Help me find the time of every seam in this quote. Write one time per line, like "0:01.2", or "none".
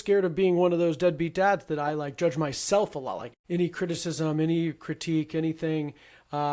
0:03.3